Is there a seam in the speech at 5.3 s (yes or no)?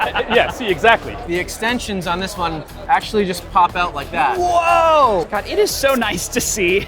yes